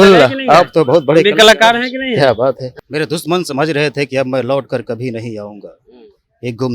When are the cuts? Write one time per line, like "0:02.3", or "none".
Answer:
0:02.7